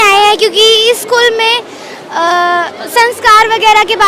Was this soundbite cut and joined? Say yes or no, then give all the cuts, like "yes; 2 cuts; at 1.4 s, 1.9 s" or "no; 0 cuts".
no; 0 cuts